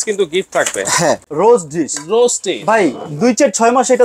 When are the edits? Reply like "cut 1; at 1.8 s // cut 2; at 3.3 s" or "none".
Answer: cut 1; at 1.2 s

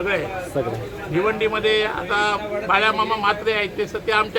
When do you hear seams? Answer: none

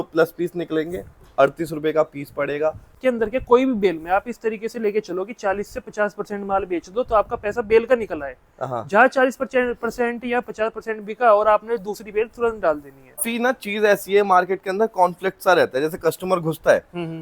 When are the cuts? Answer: cut 1; at 2.9 s // cut 2; at 13.3 s

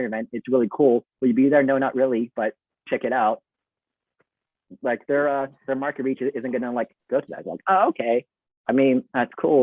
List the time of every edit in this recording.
none

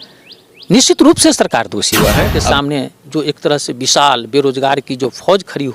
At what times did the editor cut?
cut 1; at 2.3 s

